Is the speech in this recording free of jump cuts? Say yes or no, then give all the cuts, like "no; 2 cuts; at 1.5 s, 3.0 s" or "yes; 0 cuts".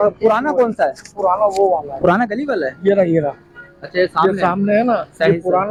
yes; 0 cuts